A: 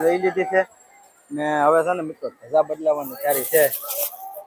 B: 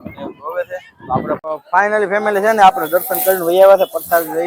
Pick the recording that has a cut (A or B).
B